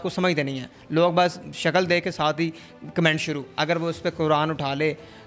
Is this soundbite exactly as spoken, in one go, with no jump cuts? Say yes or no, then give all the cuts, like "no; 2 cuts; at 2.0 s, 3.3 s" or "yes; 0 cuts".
no; 1 cut; at 3.5 s